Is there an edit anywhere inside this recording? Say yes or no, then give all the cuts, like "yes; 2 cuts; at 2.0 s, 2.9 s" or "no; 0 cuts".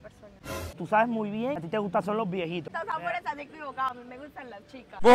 yes; 2 cuts; at 0.8 s, 2.7 s